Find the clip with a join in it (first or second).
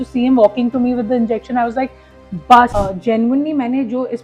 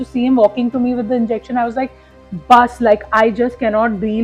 first